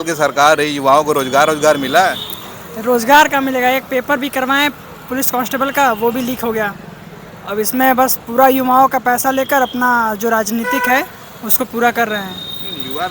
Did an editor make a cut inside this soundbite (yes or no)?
no